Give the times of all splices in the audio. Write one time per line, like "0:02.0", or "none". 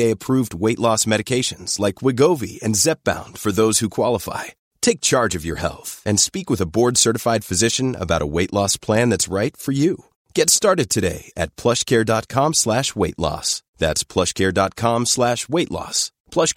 none